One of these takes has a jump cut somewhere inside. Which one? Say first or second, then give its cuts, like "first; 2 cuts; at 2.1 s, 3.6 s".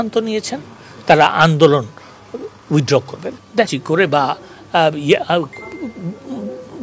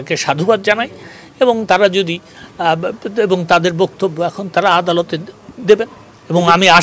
first; 1 cut; at 3.7 s